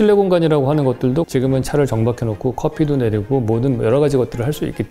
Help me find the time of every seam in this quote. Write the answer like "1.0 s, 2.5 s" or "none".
1.3 s